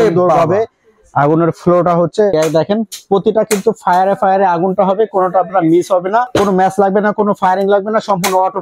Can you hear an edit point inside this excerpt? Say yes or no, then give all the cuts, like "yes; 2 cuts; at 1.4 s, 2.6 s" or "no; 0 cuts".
yes; 2 cuts; at 2.3 s, 6.3 s